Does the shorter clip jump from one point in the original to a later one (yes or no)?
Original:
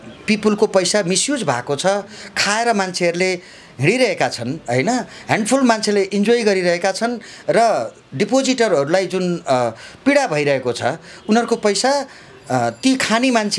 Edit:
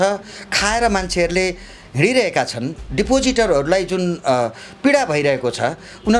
yes